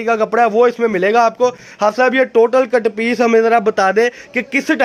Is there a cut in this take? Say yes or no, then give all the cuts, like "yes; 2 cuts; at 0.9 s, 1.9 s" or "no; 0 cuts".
no; 0 cuts